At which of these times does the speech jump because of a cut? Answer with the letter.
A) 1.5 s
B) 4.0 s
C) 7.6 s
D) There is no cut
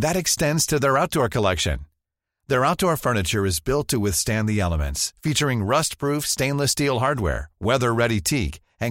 D